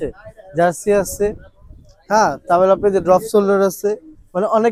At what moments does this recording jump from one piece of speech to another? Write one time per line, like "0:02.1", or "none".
none

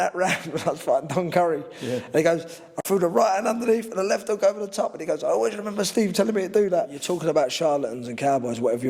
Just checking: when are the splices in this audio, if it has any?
0:07.0

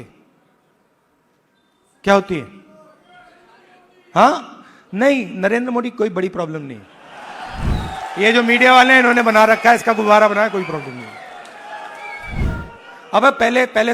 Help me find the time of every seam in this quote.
0:07.7
0:12.4

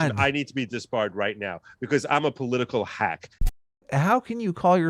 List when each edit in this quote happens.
0:03.7

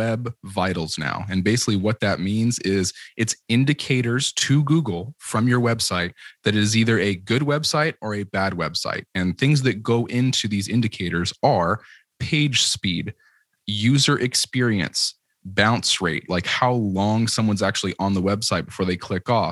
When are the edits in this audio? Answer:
none

